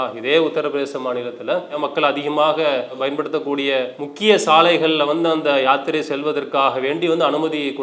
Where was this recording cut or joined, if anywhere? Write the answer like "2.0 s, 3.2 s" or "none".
1.8 s, 4.0 s